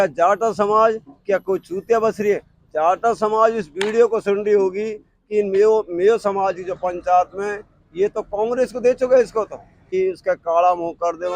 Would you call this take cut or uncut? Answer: cut